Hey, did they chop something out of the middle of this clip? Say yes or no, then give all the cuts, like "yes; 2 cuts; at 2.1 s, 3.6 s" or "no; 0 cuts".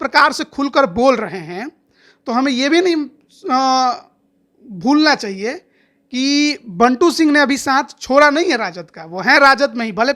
no; 0 cuts